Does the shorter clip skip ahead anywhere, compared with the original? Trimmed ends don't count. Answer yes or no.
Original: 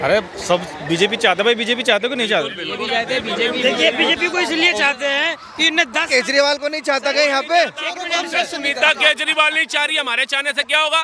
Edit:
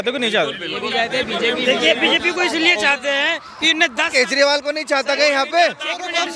no